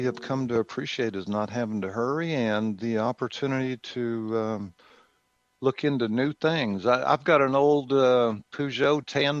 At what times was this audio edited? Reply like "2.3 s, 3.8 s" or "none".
none

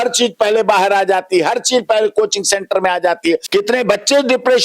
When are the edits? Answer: 3.4 s

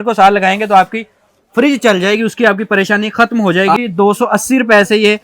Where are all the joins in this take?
3.8 s

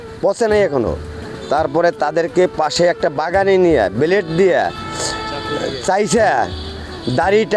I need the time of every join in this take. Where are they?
none

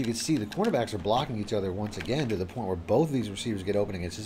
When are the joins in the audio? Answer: none

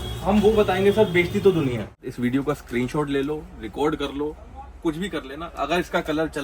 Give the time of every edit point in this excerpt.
2.0 s

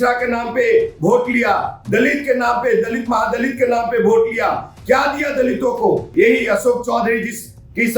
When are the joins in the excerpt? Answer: 6.1 s

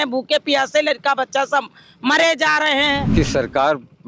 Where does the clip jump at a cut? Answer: 3.1 s

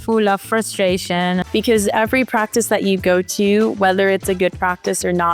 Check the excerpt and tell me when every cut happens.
1.4 s

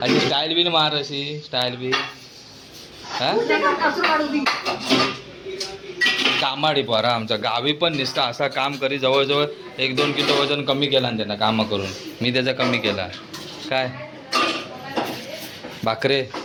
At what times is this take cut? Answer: none

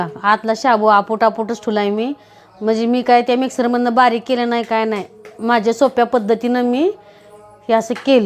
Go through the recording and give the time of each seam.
none

